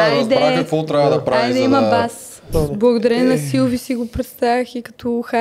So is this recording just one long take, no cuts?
no; 1 cut; at 2.5 s

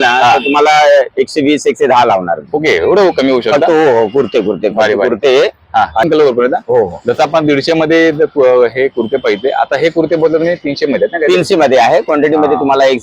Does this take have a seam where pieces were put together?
yes; 1 cut; at 6.0 s

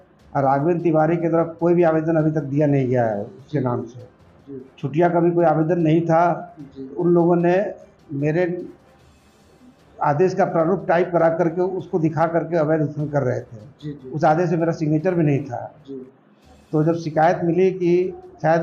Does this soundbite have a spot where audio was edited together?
no; 0 cuts

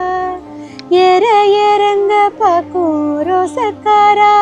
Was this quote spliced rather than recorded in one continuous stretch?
no; 0 cuts

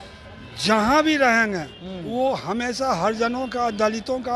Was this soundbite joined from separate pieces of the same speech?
no; 0 cuts

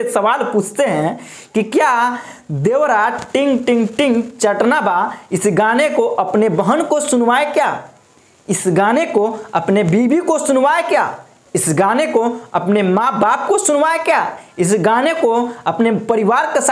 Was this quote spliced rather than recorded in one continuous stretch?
no; 0 cuts

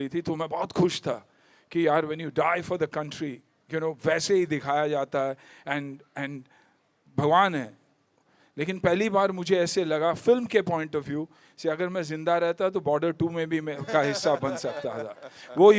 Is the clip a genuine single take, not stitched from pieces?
yes; 0 cuts

